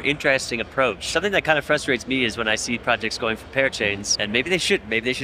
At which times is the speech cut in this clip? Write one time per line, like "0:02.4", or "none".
0:01.0
0:04.1